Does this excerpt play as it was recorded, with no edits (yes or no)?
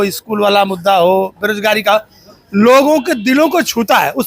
yes